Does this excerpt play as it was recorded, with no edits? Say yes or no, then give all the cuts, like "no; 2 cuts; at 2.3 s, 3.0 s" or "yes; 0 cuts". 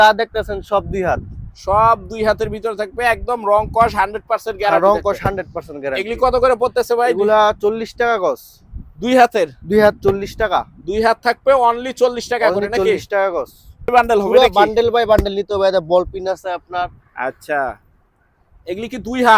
no; 1 cut; at 13.9 s